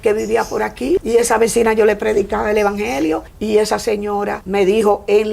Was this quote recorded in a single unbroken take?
no; 3 cuts; at 1.0 s, 3.3 s, 4.4 s

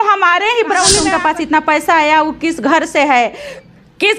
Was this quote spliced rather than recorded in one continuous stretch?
yes; 1 cut; at 1.0 s

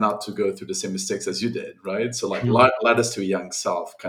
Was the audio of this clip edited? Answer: no; 0 cuts

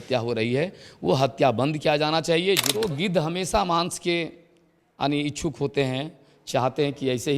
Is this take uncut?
no; 1 cut; at 2.7 s

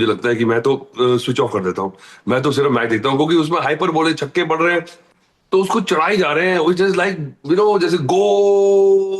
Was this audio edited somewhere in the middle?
no; 0 cuts

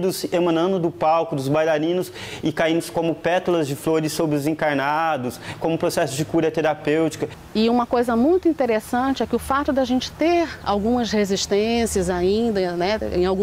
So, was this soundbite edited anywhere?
yes; 1 cut; at 7.3 s

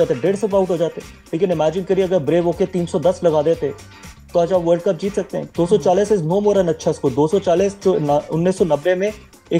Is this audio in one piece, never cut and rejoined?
no; 1 cut; at 5.4 s

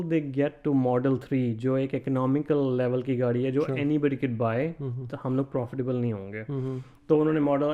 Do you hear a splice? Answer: no; 0 cuts

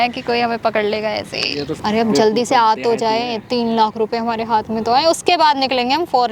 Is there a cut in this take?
yes; 1 cut; at 1.7 s

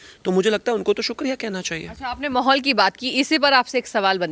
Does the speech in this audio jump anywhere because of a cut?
no; 0 cuts

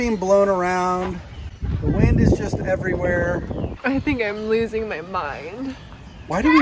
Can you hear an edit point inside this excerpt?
yes; 1 cut; at 3.7 s

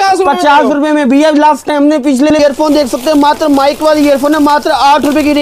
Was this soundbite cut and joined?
yes; 1 cut; at 2.4 s

